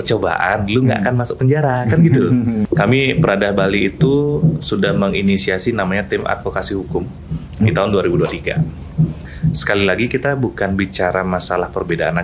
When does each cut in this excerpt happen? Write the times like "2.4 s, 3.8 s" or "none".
2.7 s, 9.2 s